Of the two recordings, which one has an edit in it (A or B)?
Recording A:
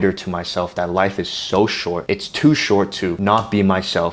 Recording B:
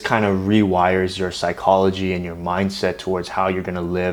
A